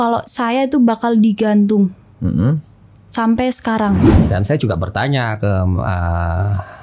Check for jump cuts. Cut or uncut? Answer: cut